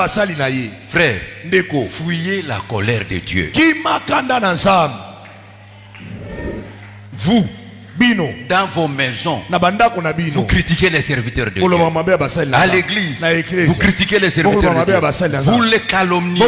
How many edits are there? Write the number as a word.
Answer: zero